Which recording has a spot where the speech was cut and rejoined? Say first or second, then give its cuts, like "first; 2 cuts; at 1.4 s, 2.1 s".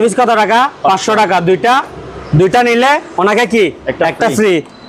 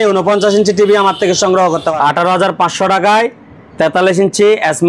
second; 1 cut; at 1.9 s